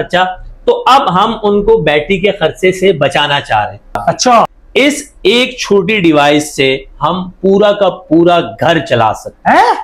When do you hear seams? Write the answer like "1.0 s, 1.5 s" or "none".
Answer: 4.5 s